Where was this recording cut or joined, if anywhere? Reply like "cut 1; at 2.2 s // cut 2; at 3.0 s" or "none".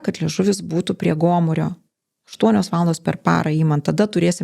none